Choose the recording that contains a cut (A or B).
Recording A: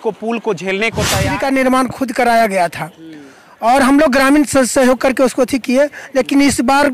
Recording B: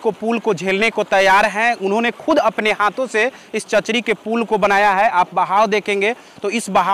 A